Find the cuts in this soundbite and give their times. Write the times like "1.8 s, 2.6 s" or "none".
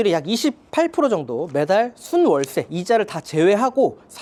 none